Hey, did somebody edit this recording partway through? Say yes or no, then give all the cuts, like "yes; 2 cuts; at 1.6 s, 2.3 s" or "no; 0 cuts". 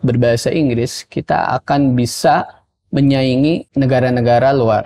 yes; 1 cut; at 3.7 s